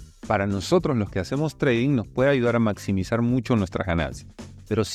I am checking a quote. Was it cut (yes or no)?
no